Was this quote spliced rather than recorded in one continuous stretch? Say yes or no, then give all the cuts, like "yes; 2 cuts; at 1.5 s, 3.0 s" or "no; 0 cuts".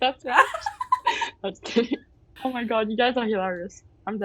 yes; 1 cut; at 2.2 s